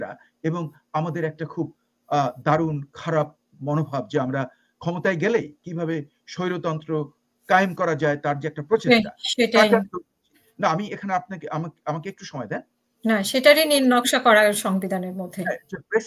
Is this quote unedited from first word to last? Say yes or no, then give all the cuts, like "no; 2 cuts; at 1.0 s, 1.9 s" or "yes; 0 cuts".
yes; 0 cuts